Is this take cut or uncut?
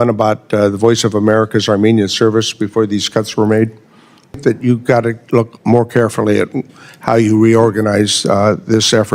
cut